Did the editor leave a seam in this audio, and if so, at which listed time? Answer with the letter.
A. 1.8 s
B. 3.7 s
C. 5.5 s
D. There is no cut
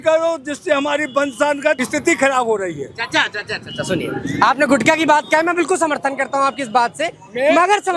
A